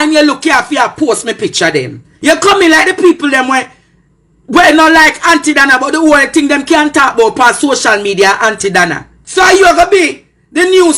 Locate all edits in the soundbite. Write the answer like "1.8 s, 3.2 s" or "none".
2.1 s, 9.2 s